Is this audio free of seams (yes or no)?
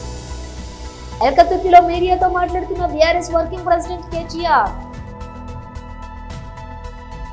no